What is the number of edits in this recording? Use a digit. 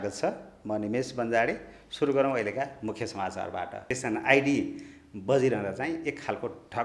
1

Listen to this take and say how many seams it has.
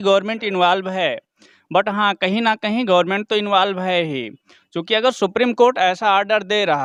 0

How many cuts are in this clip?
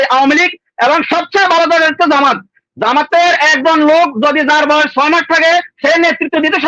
0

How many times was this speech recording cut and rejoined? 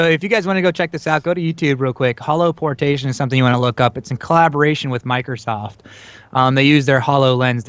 1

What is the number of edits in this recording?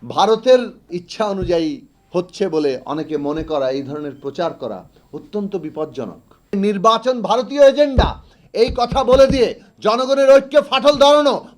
2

